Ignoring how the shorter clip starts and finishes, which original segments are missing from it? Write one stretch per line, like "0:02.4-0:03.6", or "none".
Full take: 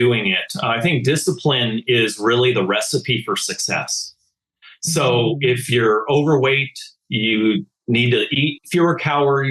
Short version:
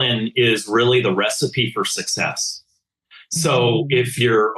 none

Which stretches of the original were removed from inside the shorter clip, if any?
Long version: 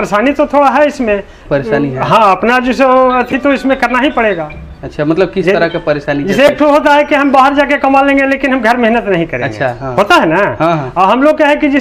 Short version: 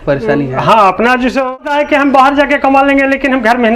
0:03.0-0:06.7

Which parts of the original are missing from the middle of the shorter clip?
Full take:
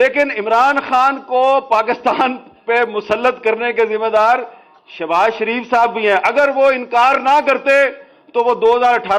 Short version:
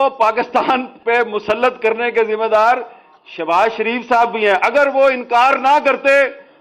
0:02.4-0:02.5

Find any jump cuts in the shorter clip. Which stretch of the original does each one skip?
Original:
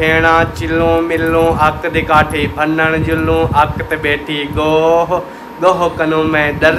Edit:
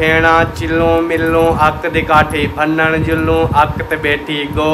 none

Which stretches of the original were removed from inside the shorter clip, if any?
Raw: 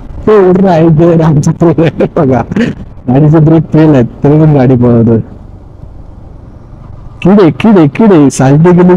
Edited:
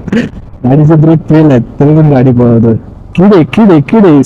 0:05.4-0:07.0

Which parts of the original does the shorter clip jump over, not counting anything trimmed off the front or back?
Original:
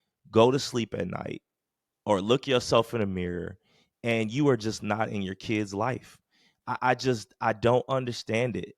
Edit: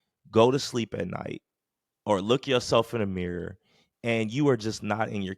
none

